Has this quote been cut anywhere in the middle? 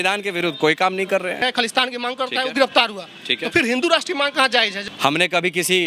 yes; 2 cuts; at 1.4 s, 4.9 s

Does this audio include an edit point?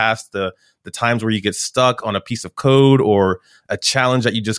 no; 0 cuts

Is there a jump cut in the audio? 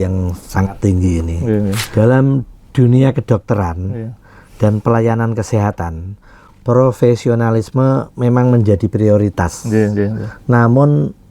yes; 1 cut; at 1.8 s

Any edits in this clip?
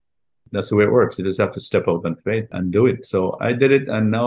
yes; 1 cut; at 2.5 s

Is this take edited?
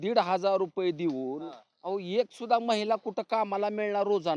no; 0 cuts

